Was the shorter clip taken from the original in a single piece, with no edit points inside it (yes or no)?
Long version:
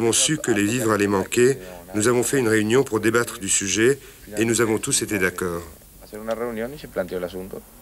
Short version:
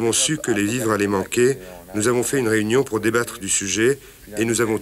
yes